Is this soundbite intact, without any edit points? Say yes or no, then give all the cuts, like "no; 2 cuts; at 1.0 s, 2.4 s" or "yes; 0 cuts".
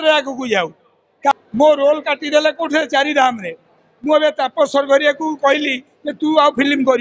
no; 1 cut; at 1.3 s